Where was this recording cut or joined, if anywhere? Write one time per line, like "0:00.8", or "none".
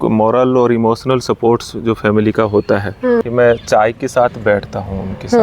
0:03.2